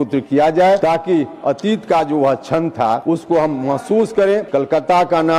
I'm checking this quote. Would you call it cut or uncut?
cut